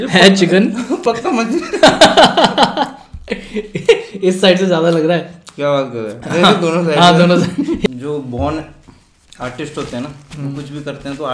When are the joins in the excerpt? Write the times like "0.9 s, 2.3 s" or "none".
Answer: 8.0 s

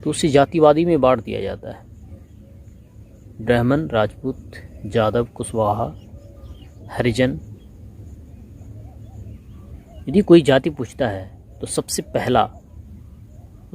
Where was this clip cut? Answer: 9.6 s

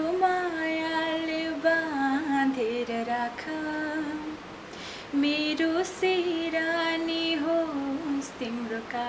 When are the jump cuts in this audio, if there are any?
none

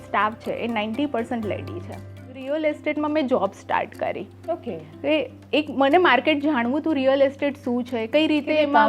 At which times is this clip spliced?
2.3 s

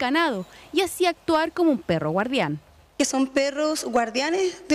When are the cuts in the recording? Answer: none

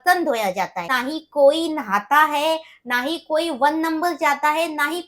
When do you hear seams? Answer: 0.9 s

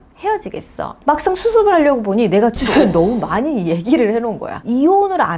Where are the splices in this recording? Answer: 1.0 s, 4.6 s

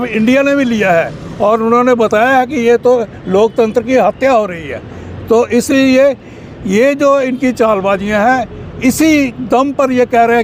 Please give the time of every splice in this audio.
none

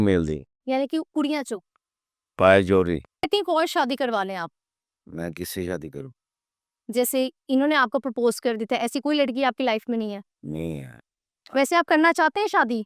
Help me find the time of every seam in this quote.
3.3 s

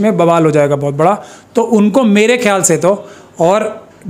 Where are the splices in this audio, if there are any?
none

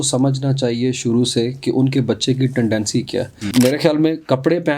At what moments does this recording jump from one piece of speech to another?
3.4 s

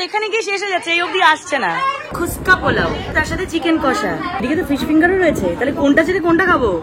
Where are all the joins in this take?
2.1 s, 3.1 s, 4.4 s

